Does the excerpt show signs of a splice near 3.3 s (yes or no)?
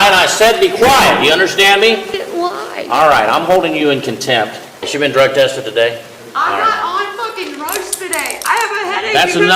no